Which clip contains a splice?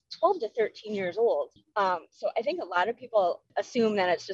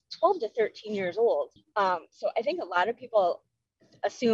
first; 1 cut; at 3.4 s

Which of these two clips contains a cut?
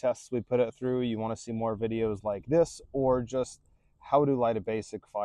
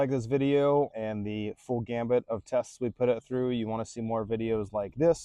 second; 1 cut; at 0.9 s

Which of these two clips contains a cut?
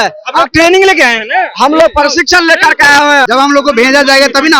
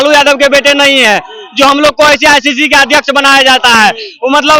first; 1 cut; at 3.2 s

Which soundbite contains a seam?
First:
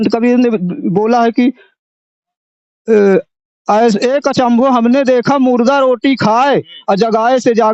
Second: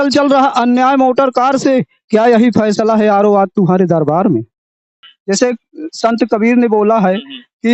second; 1 cut; at 5.1 s

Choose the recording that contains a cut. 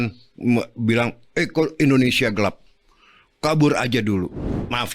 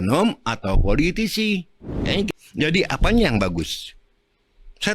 second; 1 cut; at 2.3 s

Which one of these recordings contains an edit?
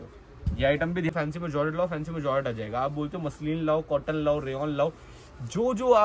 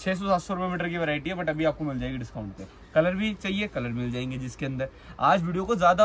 first; 1 cut; at 1.1 s

